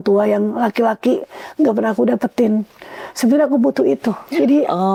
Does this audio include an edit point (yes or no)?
no